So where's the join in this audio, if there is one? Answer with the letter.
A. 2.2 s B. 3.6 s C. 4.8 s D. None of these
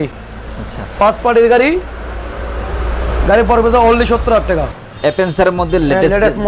C